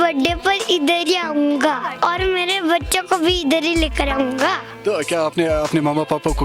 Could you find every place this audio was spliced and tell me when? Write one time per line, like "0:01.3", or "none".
0:01.9